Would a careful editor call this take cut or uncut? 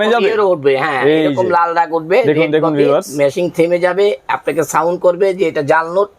uncut